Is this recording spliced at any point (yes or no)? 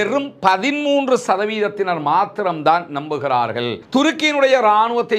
yes